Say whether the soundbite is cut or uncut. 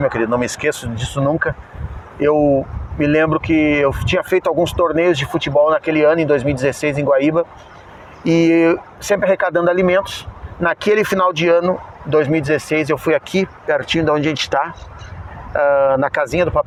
uncut